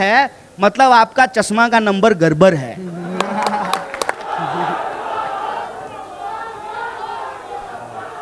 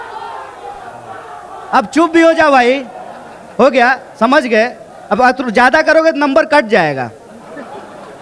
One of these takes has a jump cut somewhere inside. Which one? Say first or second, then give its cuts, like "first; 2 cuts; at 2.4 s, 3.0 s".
first; 1 cut; at 4.2 s